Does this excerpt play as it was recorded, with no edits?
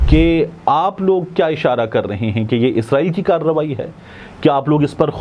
yes; 0 cuts

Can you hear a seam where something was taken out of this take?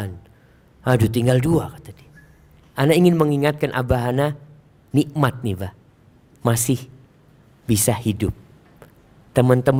no; 0 cuts

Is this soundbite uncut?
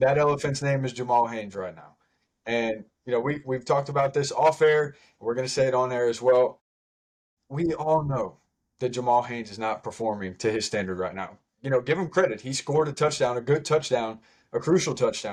yes; 0 cuts

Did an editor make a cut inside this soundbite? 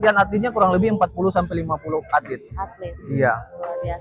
no; 0 cuts

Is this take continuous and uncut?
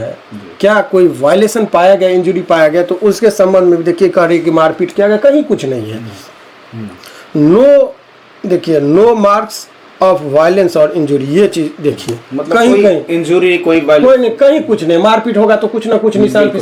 yes; 0 cuts

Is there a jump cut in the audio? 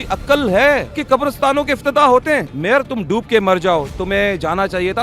yes; 2 cuts; at 0.9 s, 2.5 s

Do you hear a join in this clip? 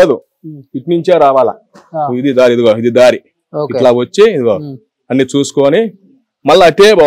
no; 0 cuts

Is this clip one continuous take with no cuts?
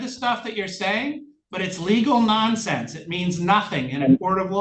yes; 0 cuts

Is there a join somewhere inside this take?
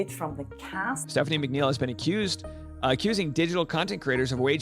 yes; 1 cut; at 1.0 s

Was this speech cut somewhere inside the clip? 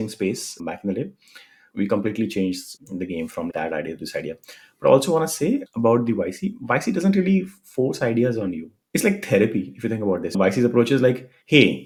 no; 0 cuts

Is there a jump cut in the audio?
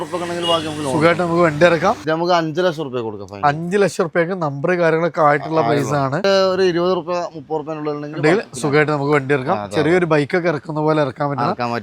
yes; 2 cuts; at 2.0 s, 6.2 s

